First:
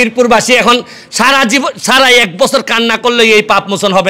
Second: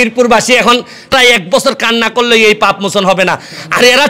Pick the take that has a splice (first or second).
second